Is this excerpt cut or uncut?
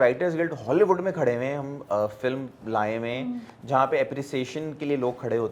uncut